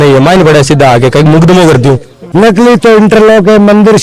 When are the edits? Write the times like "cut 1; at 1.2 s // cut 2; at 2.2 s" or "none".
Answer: cut 1; at 2.2 s